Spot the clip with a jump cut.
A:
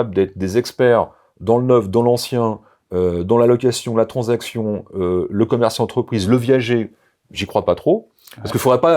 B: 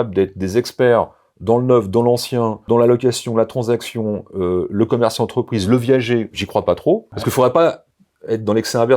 B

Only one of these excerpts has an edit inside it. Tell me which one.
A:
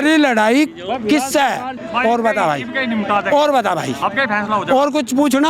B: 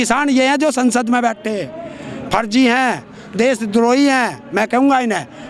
A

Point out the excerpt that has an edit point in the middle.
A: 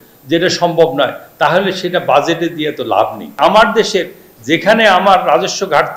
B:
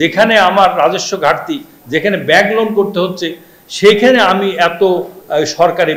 A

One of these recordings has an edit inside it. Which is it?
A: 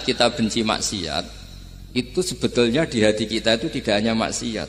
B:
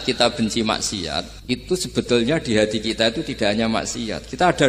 B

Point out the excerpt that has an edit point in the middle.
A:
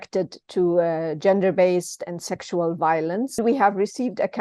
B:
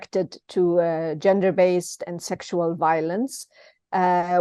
A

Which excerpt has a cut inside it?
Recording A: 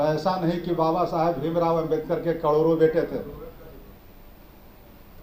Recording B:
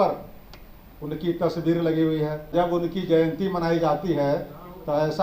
B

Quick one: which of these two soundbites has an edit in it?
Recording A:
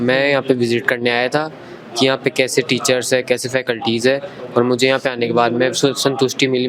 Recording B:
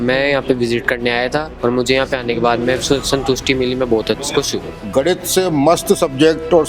B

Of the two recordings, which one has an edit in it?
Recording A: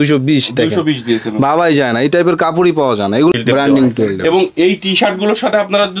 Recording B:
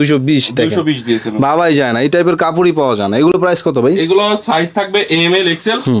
A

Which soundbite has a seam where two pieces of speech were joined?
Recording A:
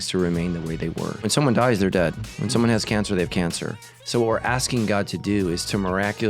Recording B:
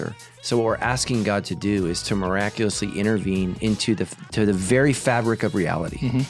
A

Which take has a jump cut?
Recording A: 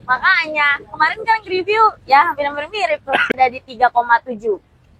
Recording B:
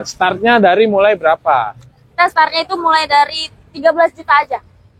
A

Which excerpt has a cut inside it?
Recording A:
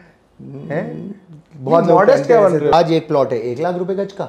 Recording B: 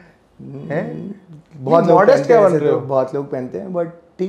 A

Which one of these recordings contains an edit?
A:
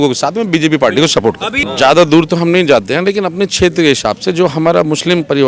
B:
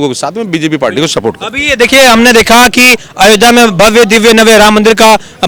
A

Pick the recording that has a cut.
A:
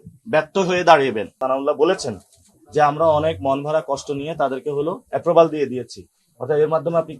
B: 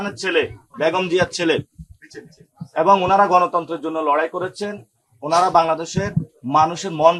A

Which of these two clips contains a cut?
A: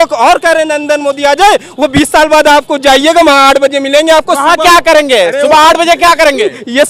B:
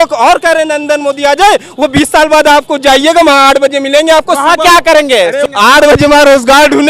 B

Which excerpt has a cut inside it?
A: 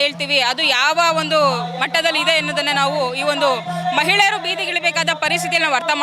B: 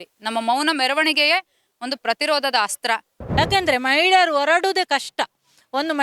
B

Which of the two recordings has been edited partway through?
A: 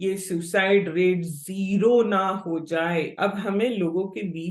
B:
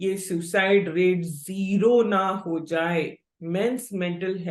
A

